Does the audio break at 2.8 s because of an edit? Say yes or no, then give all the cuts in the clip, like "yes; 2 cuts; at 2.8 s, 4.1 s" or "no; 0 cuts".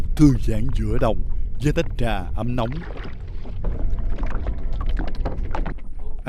no; 0 cuts